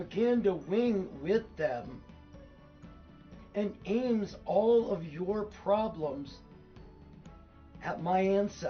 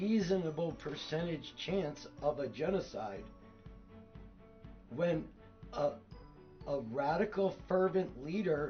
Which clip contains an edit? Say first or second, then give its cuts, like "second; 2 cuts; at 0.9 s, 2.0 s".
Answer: first; 2 cuts; at 6.5 s, 7.8 s